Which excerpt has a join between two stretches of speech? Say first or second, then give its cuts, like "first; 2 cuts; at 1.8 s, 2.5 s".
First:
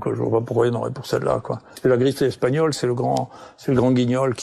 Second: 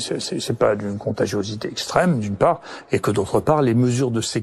first; 1 cut; at 1.7 s